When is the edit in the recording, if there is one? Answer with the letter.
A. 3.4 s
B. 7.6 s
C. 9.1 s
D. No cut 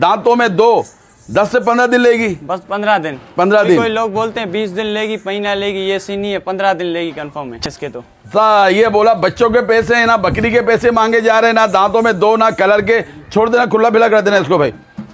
B